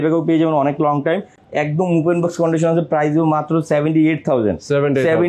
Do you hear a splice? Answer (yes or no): no